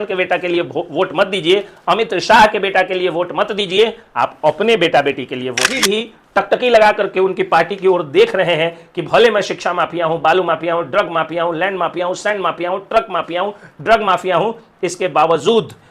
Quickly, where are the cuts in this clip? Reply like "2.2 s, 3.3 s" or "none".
5.8 s